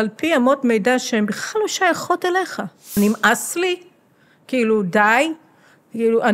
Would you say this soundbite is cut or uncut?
cut